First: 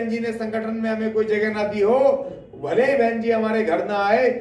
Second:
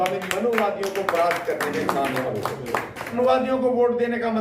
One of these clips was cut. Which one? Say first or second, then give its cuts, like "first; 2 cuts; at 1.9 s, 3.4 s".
second; 1 cut; at 3.2 s